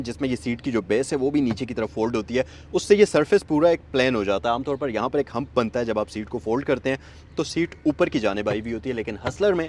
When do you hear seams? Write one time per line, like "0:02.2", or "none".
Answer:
none